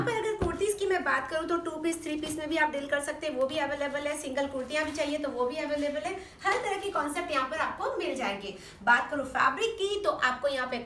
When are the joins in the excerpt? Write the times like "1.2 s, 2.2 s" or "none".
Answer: none